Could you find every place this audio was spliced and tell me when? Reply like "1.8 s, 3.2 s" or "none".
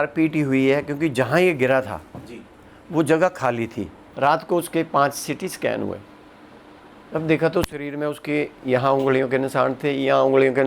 4.1 s